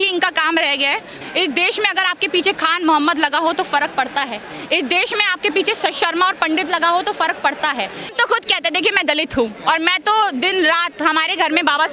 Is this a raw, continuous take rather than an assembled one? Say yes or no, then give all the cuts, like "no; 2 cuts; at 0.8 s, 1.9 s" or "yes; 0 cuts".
no; 2 cuts; at 1.1 s, 8.1 s